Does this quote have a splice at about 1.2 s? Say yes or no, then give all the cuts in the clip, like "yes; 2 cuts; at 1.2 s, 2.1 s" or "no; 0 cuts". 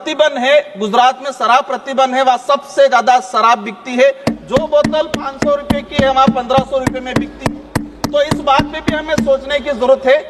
no; 0 cuts